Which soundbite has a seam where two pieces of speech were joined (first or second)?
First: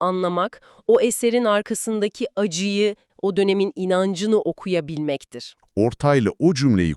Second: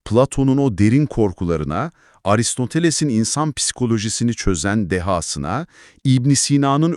first